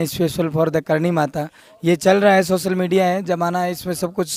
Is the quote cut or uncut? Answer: uncut